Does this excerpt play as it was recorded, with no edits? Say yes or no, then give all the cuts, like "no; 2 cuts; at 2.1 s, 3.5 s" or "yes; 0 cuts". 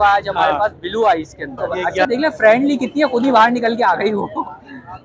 no; 1 cut; at 2.1 s